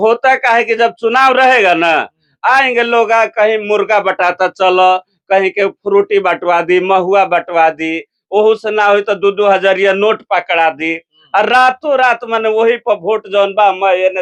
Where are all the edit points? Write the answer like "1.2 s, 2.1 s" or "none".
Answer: none